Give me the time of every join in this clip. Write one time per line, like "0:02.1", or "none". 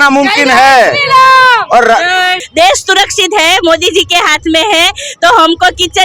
0:02.4